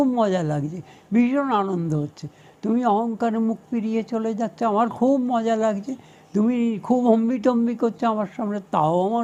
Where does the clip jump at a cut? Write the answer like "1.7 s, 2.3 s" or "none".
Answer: none